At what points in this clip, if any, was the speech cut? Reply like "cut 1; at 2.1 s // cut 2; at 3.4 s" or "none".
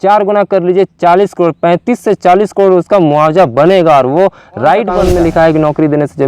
cut 1; at 5.0 s